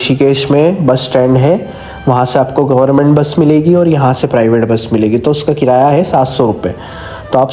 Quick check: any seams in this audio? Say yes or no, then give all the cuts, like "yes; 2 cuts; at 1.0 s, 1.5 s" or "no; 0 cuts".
no; 0 cuts